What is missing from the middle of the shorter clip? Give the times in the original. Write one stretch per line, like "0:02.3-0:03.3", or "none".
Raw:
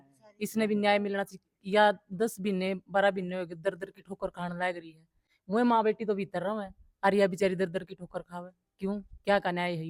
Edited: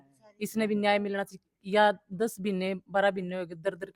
none